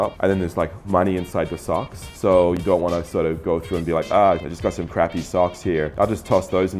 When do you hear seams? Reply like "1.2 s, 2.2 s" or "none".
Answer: 2.1 s